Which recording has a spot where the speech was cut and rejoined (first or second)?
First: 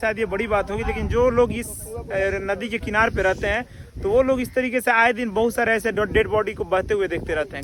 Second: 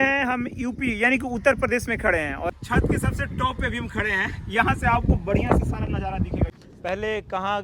second